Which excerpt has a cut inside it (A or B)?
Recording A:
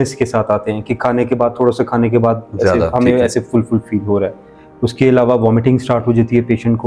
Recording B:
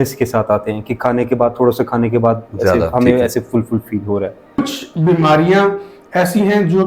B